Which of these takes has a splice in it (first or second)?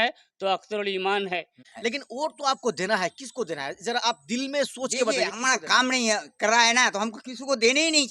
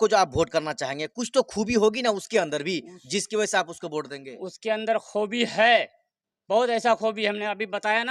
first